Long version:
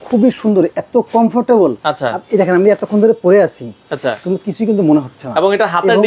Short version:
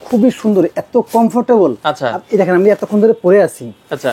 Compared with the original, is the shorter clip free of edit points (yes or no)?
yes